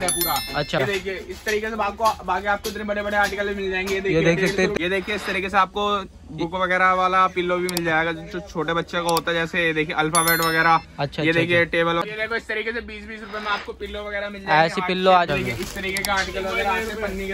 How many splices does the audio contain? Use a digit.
4